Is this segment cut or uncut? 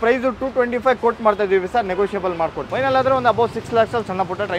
cut